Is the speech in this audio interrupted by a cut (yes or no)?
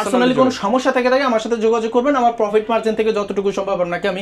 no